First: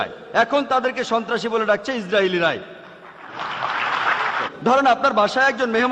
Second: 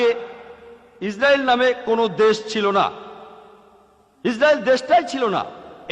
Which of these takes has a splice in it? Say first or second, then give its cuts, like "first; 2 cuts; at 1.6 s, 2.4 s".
first; 1 cut; at 4.5 s